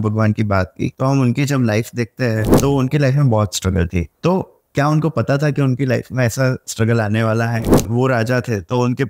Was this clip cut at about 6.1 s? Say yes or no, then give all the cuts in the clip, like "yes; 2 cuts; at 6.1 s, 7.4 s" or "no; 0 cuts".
no; 4 cuts; at 0.9 s, 2.5 s, 4.1 s, 7.9 s